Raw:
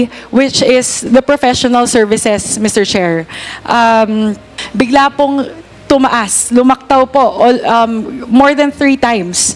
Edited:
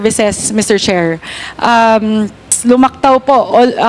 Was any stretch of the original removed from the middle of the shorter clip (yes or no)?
yes